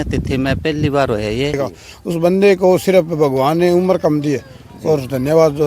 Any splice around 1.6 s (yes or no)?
yes